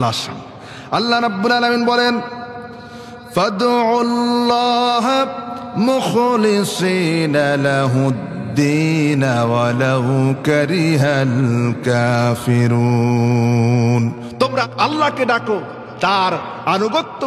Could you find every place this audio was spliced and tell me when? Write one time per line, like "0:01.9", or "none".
0:14.7